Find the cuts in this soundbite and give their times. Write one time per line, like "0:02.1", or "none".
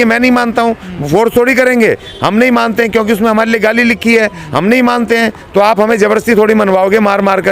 none